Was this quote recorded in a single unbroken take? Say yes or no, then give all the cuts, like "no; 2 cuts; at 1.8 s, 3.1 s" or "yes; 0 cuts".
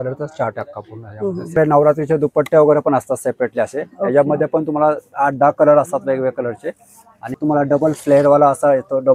no; 2 cuts; at 1.6 s, 7.4 s